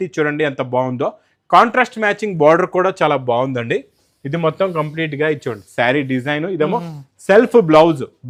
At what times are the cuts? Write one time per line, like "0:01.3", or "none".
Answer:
none